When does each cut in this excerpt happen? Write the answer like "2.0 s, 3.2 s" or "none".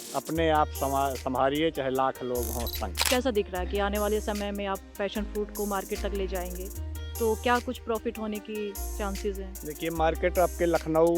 3.1 s